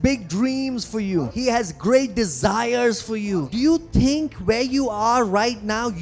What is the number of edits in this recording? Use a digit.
2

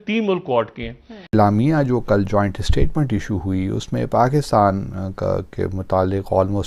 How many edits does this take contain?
1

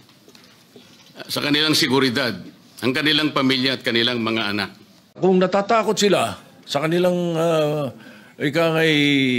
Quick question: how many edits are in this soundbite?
1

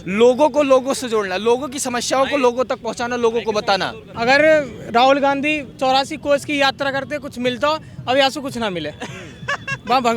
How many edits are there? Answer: 0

